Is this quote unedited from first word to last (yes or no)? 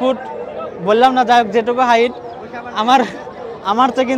yes